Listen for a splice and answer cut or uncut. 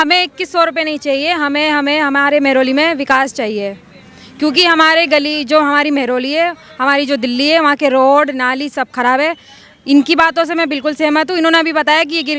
uncut